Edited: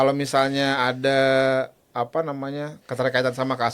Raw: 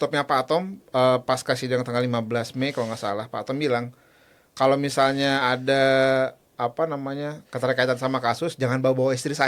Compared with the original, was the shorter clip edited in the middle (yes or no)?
no